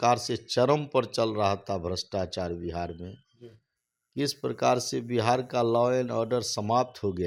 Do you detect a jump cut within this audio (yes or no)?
no